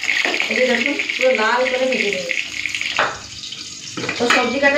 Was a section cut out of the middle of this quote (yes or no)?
yes